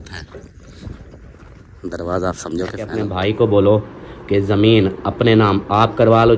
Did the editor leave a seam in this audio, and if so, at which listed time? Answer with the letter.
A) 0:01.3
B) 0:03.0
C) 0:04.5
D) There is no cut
B